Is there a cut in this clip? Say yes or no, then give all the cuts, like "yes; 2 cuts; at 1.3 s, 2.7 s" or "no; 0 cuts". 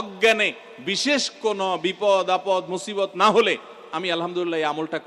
no; 0 cuts